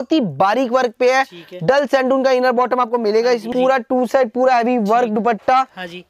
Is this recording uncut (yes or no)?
no